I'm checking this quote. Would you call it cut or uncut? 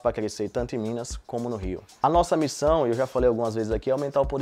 cut